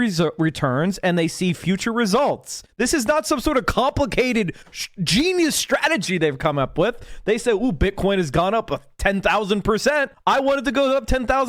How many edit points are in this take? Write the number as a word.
zero